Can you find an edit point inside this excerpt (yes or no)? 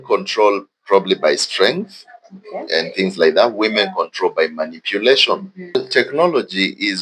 yes